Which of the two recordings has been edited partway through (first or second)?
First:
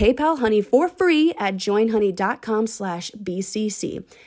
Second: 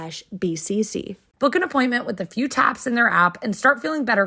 second